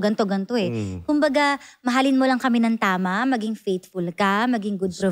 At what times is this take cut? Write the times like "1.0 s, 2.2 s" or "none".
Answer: none